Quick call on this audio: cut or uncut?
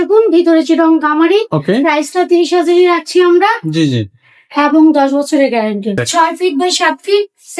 cut